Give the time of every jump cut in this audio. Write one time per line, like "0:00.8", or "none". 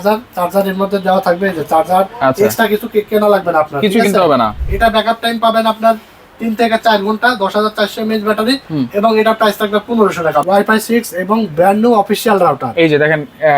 0:04.6
0:10.4